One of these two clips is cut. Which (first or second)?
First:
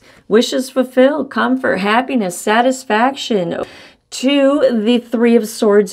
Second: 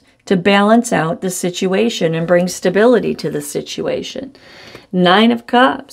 first